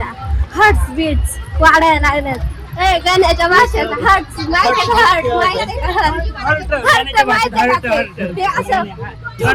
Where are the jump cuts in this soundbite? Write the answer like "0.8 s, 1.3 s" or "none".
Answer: none

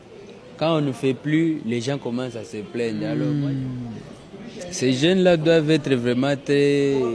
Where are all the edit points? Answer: 3.2 s

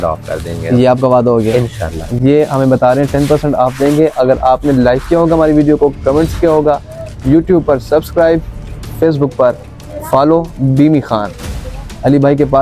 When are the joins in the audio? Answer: none

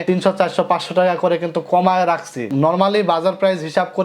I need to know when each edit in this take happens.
2.5 s

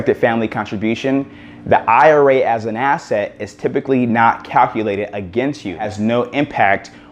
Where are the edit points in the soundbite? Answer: 5.9 s

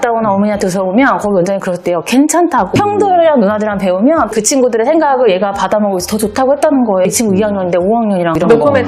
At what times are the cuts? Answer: none

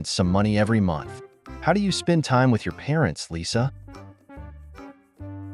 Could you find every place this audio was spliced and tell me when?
3.7 s

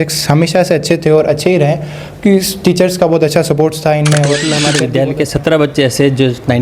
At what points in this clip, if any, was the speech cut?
4.7 s

